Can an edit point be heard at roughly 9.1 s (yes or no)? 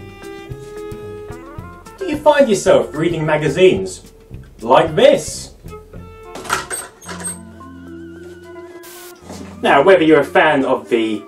yes